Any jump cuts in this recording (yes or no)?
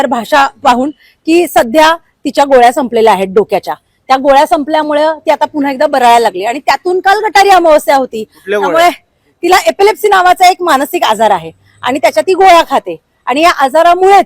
no